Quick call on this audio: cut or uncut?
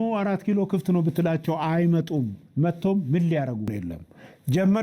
cut